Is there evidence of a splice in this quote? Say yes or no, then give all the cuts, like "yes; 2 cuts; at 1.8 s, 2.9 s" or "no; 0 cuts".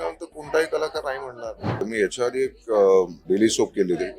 yes; 2 cuts; at 1.8 s, 3.2 s